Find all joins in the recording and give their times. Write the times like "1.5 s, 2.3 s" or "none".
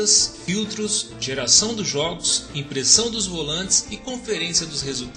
3.9 s